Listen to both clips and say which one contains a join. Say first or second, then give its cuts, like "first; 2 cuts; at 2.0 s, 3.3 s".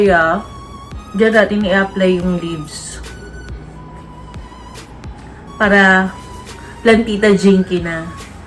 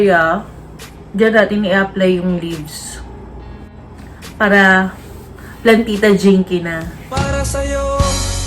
second; 2 cuts; at 3.7 s, 6.9 s